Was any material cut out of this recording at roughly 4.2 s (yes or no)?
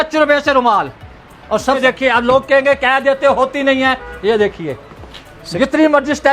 no